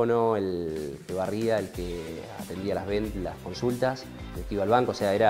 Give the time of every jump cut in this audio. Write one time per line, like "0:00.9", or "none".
none